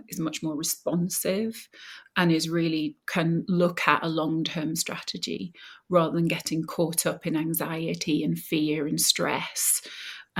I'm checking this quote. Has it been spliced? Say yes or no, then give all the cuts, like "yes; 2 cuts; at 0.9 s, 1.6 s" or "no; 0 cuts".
no; 0 cuts